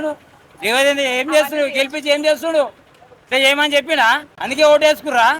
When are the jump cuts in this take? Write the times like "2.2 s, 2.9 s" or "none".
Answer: 4.4 s